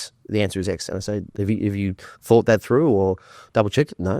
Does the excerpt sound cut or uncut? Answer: cut